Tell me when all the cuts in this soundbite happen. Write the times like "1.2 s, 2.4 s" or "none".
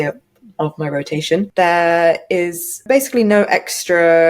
1.5 s, 2.8 s